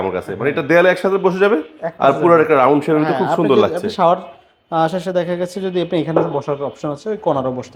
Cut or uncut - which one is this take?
uncut